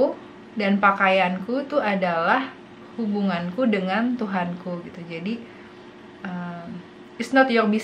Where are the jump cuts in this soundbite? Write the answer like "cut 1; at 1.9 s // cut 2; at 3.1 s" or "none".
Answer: none